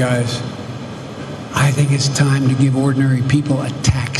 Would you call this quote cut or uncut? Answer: uncut